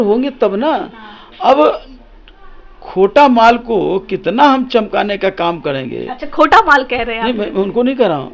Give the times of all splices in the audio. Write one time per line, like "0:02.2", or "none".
none